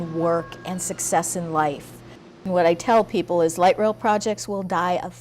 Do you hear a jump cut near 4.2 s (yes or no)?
no